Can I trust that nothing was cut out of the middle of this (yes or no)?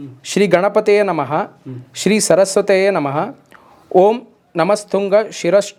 yes